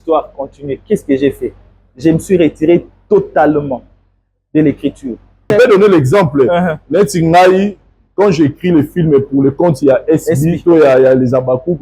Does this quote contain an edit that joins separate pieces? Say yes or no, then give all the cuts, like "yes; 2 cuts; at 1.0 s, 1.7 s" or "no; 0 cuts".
yes; 1 cut; at 5.5 s